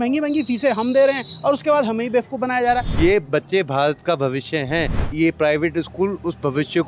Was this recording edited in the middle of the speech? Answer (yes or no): yes